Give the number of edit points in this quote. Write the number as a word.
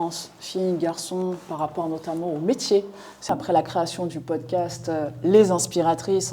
one